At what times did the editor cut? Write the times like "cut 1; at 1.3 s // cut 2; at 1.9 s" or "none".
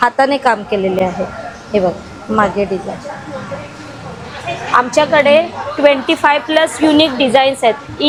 none